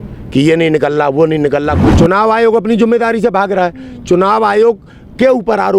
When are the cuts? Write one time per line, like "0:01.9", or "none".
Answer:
0:01.8